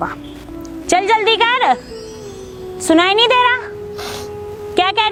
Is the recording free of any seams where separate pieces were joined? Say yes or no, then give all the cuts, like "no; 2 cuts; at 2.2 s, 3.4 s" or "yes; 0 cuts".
yes; 0 cuts